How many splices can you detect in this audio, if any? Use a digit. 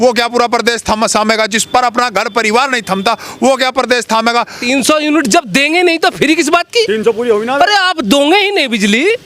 1